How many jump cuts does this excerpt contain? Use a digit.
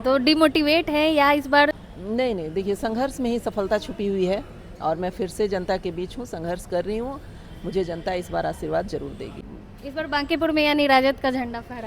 2